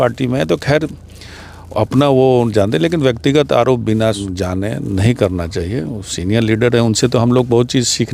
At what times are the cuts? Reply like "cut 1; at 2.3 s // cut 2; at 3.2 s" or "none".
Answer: cut 1; at 4.2 s